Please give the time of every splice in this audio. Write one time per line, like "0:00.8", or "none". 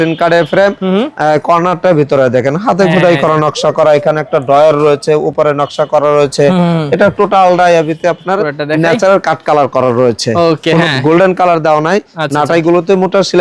none